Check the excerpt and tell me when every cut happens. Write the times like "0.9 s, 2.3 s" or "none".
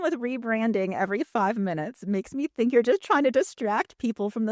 none

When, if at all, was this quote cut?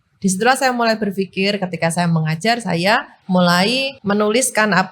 3.1 s, 3.9 s

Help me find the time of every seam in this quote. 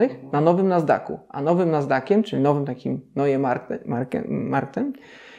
none

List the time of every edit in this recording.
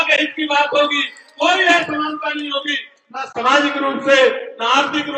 none

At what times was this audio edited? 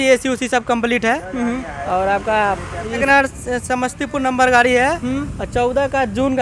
3.0 s

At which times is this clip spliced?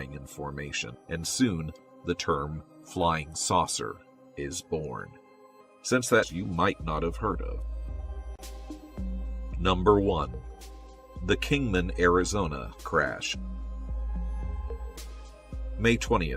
none

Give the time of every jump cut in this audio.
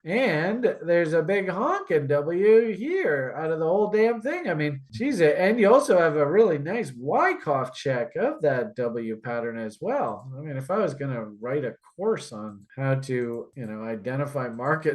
4.8 s, 13.5 s

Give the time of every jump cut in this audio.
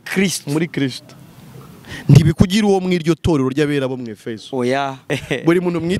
5.1 s

